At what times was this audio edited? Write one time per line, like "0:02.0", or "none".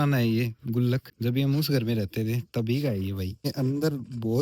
0:01.1
0:03.4